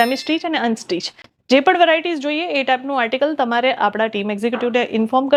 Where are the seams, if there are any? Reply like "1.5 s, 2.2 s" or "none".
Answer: none